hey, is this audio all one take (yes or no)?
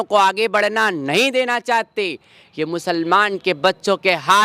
yes